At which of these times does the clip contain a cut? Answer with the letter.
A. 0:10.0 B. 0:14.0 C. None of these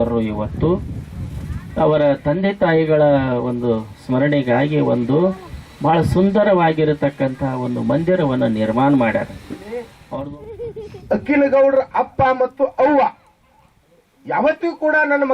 A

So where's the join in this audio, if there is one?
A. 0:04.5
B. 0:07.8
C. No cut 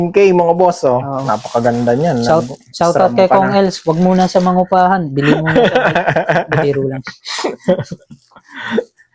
C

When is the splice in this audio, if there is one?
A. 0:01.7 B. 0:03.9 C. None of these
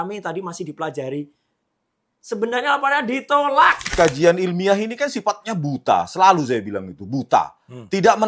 B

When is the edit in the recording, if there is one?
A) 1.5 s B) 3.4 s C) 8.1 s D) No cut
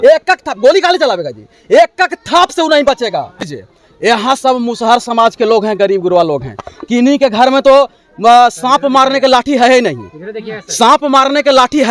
B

